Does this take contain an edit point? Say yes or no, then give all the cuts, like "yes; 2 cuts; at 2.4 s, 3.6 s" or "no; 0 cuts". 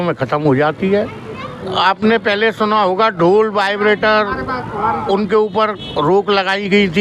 yes; 1 cut; at 1.6 s